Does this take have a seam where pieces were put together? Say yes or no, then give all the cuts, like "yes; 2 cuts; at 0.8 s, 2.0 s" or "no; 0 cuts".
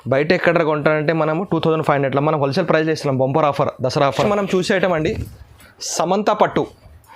yes; 1 cut; at 4.3 s